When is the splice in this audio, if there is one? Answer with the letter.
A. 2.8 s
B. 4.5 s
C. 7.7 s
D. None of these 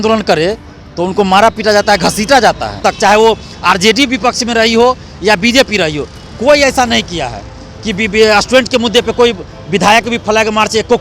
A